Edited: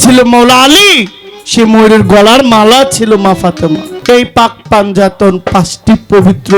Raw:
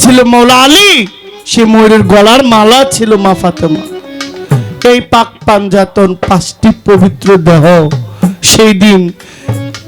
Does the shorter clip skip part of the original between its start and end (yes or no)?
yes